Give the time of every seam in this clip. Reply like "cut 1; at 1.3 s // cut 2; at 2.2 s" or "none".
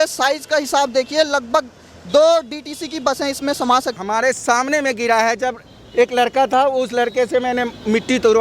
cut 1; at 4.0 s